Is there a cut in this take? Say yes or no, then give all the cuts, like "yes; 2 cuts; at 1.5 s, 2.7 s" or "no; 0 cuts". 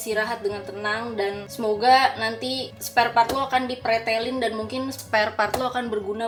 no; 0 cuts